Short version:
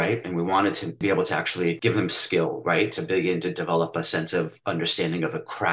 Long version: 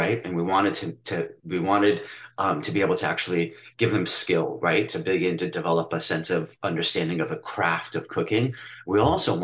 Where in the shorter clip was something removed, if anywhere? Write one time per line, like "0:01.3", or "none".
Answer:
0:00.9
0:01.8

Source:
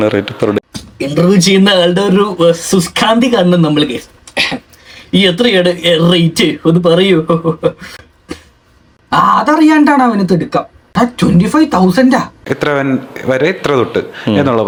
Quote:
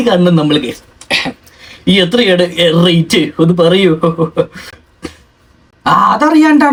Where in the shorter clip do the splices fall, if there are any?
none

